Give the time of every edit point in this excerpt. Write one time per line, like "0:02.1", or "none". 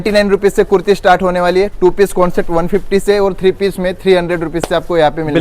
none